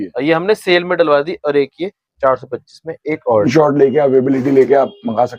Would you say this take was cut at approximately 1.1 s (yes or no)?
no